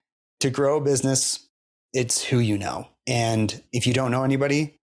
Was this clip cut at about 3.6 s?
yes; 1 cut; at 3.6 s

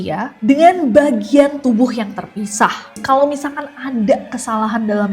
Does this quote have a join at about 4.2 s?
no; 1 cut; at 2.9 s

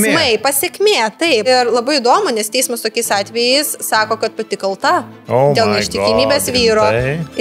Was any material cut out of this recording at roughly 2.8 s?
no; 1 cut; at 1.5 s

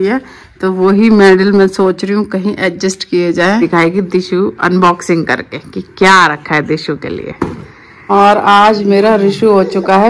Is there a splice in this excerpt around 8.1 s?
yes; 2 cuts; at 3.6 s, 8.1 s

